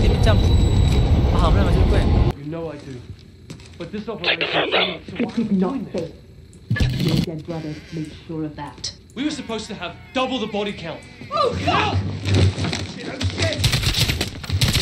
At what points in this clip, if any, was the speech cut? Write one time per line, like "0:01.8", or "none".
0:02.3